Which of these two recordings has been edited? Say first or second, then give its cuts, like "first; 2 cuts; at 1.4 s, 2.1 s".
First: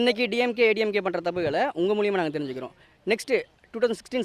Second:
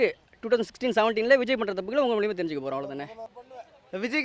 second; 1 cut; at 3.3 s